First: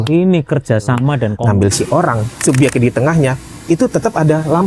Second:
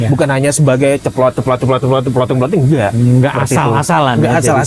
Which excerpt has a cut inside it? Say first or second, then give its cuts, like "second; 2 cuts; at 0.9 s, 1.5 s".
first; 1 cut; at 1.4 s